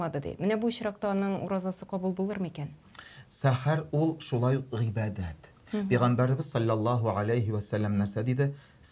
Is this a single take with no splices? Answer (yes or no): yes